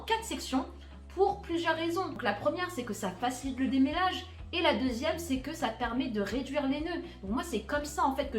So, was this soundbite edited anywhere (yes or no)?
yes